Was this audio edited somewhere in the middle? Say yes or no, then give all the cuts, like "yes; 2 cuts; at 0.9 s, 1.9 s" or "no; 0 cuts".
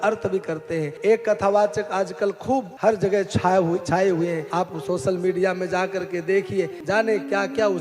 yes; 4 cuts; at 0.9 s, 2.7 s, 4.4 s, 6.8 s